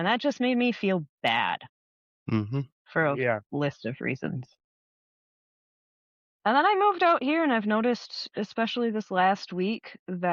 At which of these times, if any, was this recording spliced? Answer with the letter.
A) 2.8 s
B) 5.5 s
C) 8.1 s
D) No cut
D